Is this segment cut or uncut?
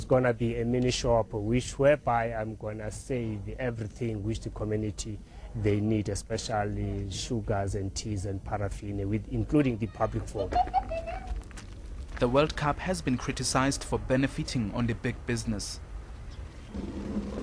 cut